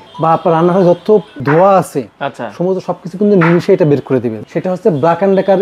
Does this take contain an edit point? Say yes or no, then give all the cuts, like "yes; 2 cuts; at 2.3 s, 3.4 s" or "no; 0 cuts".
yes; 2 cuts; at 1.3 s, 4.3 s